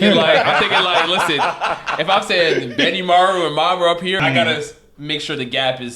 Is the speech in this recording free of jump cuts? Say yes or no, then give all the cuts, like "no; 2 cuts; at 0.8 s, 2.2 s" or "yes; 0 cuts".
no; 1 cut; at 4.2 s